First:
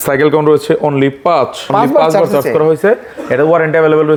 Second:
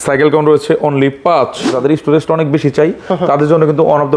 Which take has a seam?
second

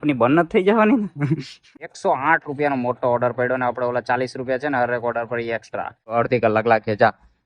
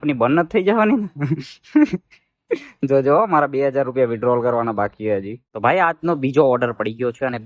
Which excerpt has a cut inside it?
first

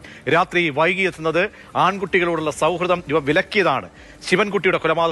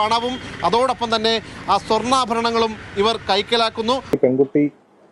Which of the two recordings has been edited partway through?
second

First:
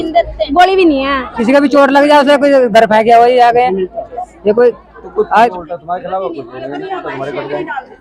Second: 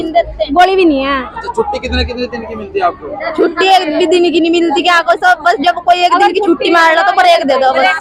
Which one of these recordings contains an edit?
first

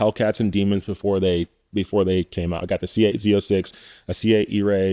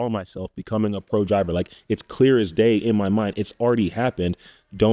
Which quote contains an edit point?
first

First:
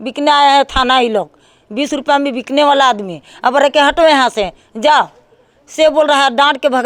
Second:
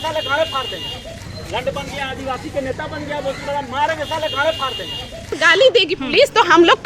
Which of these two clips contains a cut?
second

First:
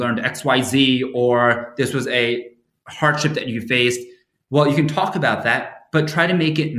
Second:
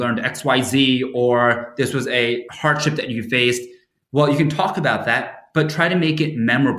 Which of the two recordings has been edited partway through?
second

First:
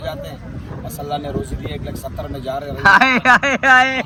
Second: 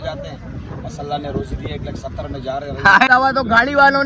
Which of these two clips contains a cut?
second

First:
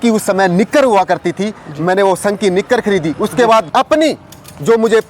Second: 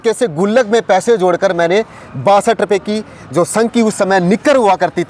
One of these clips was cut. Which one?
first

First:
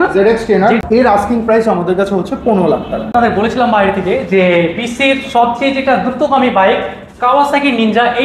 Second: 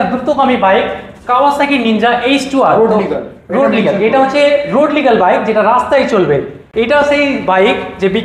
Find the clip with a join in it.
first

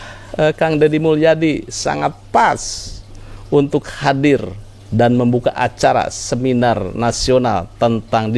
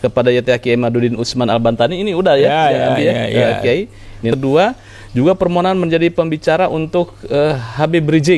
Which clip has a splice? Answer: second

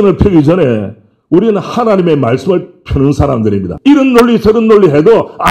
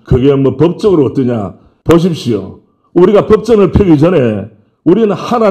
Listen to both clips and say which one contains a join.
first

